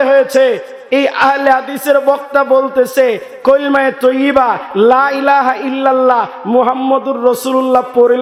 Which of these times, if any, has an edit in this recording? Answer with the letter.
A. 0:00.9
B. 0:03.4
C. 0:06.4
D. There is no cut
D